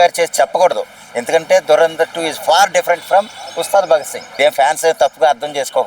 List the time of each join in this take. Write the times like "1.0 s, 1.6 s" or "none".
4.2 s